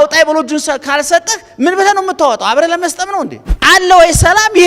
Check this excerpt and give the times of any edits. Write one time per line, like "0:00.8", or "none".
0:03.5